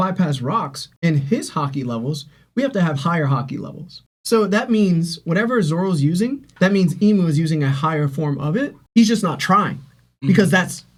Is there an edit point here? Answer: no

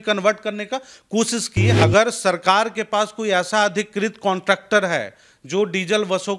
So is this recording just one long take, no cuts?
no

